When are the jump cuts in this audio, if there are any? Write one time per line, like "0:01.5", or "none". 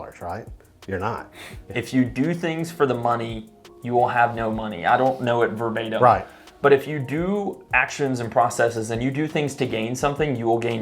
0:01.6